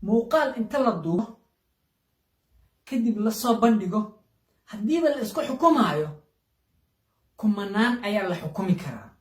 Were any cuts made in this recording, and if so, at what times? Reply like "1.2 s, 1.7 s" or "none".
1.2 s